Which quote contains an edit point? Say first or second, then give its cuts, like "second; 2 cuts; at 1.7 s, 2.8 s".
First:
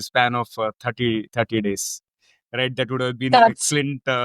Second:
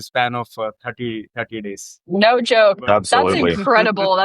second; 1 cut; at 1.9 s